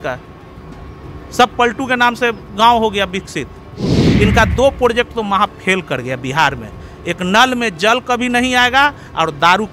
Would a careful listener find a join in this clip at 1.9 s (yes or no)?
no